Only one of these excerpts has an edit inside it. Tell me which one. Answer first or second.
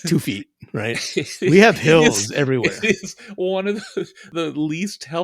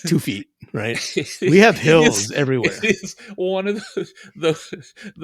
first